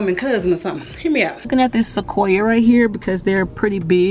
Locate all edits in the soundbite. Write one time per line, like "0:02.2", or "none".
0:01.5